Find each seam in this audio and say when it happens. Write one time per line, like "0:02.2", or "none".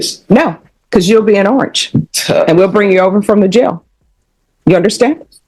none